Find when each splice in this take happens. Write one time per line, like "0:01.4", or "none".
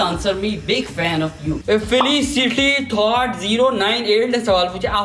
0:01.6